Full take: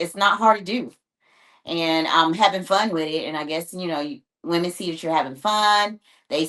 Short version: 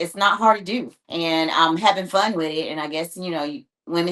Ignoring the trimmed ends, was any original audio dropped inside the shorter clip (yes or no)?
yes